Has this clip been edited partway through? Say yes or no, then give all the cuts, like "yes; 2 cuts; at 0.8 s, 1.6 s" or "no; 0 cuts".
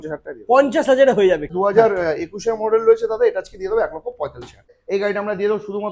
yes; 2 cuts; at 1.5 s, 4.7 s